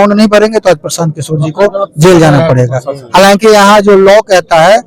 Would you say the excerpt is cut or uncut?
uncut